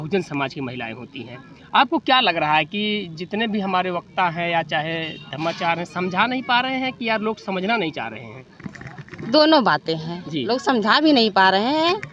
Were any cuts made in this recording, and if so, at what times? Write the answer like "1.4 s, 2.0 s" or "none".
none